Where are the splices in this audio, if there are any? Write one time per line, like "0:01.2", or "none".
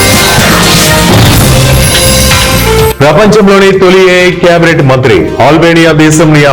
0:03.0